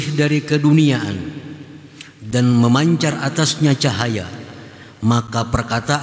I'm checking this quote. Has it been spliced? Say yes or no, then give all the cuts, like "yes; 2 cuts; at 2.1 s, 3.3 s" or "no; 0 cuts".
no; 0 cuts